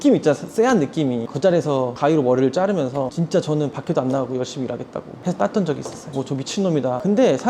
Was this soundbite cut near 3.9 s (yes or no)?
no